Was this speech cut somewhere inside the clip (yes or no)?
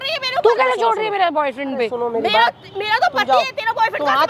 no